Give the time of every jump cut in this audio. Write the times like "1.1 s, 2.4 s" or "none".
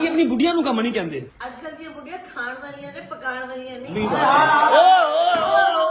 1.3 s